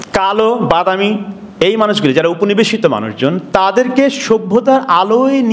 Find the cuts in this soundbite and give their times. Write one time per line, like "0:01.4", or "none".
none